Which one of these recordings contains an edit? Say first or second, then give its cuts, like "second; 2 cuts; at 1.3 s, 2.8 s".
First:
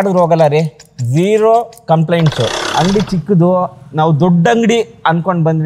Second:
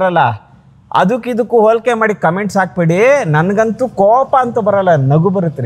first; 1 cut; at 2.6 s